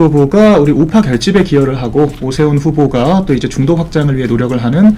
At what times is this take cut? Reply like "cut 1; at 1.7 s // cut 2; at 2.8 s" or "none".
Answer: none